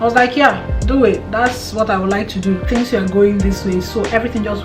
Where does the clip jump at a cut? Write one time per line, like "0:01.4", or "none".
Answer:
0:02.6